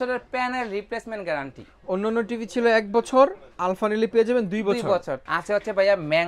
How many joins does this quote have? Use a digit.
1